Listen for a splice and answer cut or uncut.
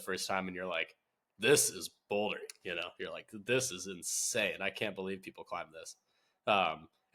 uncut